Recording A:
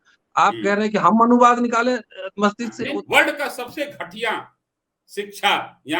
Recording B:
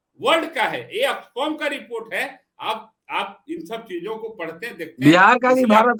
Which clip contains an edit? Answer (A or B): A